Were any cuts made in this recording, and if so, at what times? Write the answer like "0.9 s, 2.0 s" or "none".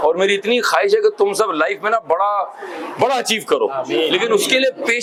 none